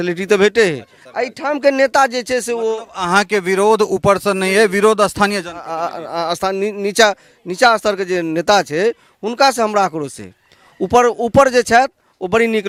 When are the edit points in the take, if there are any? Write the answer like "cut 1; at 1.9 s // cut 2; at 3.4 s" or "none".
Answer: none